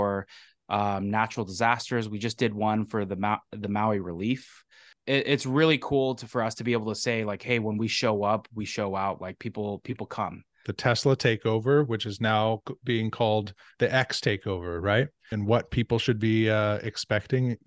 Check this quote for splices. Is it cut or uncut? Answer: cut